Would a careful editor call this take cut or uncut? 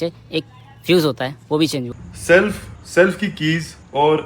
uncut